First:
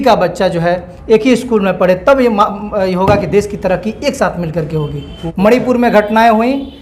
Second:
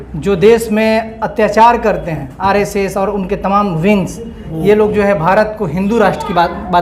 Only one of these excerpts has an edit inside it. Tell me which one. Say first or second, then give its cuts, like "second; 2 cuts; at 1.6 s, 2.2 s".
first; 1 cut; at 5.2 s